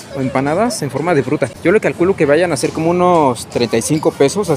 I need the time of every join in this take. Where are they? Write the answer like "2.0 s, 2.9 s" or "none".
1.6 s